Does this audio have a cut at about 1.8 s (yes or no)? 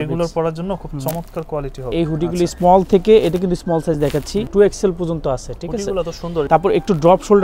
yes